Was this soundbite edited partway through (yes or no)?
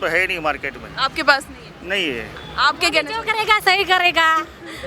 yes